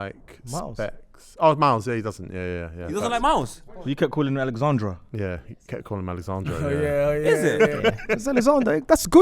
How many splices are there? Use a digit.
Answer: 1